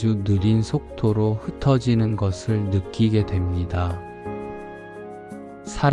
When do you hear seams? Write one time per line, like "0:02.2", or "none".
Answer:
0:03.9
0:05.2